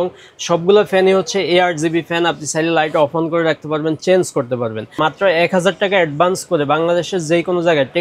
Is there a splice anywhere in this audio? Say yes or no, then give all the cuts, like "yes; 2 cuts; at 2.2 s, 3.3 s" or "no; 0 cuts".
yes; 1 cut; at 5.0 s